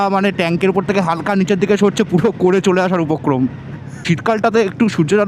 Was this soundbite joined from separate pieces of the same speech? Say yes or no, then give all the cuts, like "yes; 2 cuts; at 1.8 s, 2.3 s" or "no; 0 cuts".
yes; 1 cut; at 4.0 s